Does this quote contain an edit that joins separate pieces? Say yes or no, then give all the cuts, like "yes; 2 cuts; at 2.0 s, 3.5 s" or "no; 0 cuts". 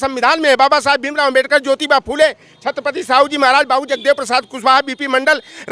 no; 0 cuts